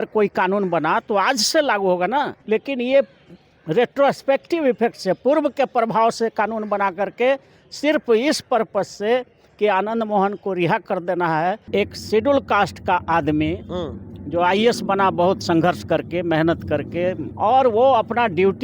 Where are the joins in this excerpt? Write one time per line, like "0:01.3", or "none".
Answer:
0:02.4
0:11.7
0:17.3